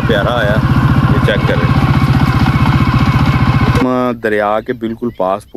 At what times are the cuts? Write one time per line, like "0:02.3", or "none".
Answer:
0:03.8

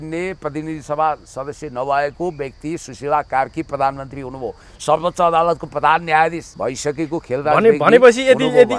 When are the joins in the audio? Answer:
0:06.5

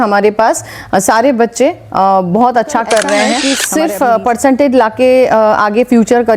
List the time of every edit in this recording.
0:03.5

